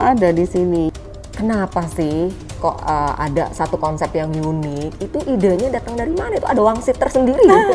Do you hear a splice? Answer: yes; 1 cut; at 0.9 s

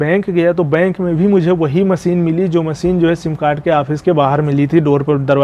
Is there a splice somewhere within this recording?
no; 0 cuts

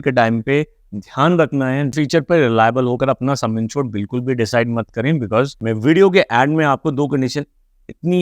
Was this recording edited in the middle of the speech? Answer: yes; 2 cuts; at 1.9 s, 5.6 s

